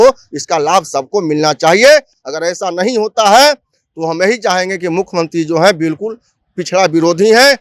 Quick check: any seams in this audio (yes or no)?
no